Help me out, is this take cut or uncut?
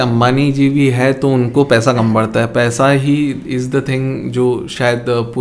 uncut